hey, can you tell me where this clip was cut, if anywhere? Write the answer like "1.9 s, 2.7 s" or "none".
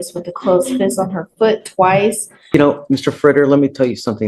2.5 s